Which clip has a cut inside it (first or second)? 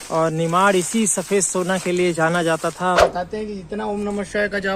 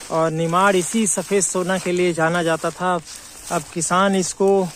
first